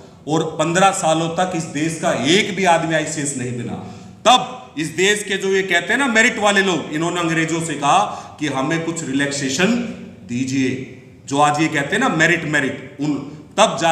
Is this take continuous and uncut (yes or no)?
yes